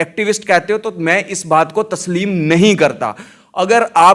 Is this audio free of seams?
yes; 0 cuts

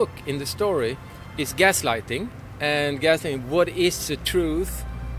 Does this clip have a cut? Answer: yes; 1 cut; at 2.4 s

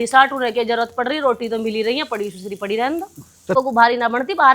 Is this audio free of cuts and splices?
no; 1 cut; at 3.6 s

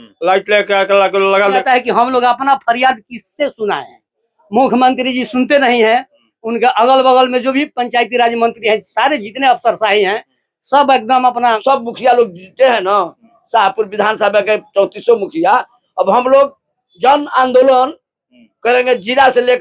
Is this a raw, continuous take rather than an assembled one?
no; 2 cuts; at 1.6 s, 11.6 s

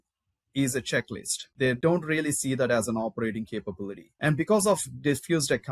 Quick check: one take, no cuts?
no; 2 cuts; at 1.7 s, 4.0 s

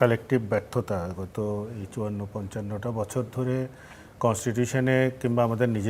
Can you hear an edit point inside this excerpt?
no; 0 cuts

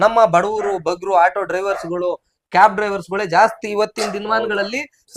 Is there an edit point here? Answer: no; 0 cuts

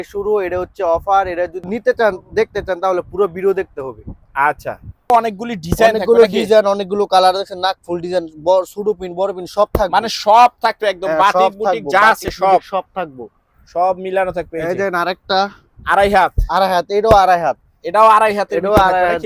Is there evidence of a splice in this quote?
yes; 2 cuts; at 1.7 s, 5.1 s

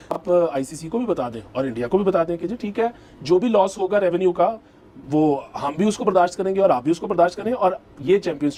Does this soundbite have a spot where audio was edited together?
no; 0 cuts

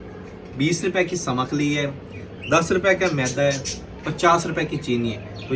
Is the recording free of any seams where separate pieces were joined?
yes; 0 cuts

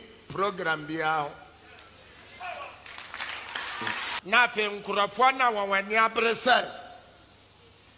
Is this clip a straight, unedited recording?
no; 1 cut; at 4.1 s

